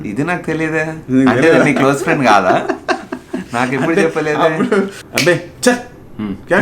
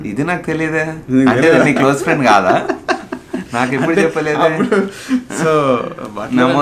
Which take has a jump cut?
first; 1 cut; at 5.0 s

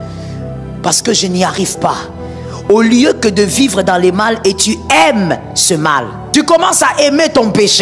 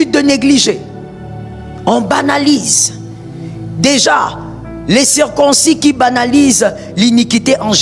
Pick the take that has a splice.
first; 1 cut; at 6.2 s

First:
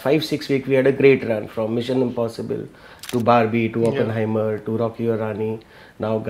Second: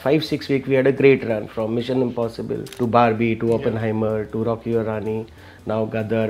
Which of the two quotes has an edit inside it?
second; 1 cut; at 2.7 s

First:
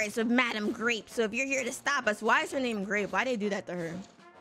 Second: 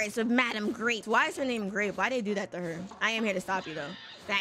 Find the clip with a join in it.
second; 2 cuts; at 1.0 s, 2.9 s

